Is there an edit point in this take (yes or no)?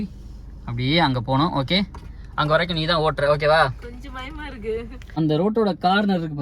yes